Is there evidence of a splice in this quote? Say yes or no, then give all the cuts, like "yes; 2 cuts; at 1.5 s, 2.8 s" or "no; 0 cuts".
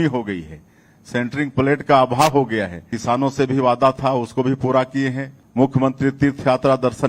yes; 2 cuts; at 2.9 s, 5.4 s